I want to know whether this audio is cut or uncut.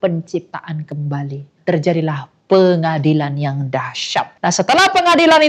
cut